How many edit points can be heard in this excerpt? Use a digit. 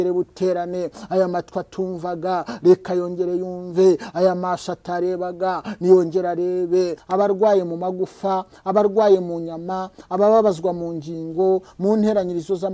1